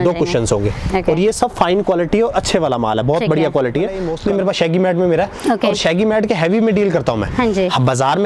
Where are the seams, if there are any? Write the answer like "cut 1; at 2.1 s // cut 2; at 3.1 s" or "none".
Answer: cut 1; at 4.1 s